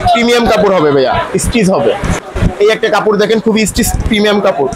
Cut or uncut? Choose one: cut